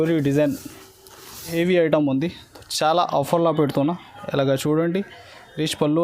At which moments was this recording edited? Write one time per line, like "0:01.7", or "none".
0:01.5